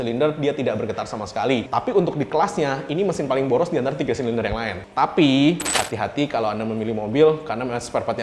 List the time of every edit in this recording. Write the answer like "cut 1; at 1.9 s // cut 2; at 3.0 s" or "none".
cut 1; at 1.7 s // cut 2; at 4.8 s // cut 3; at 5.7 s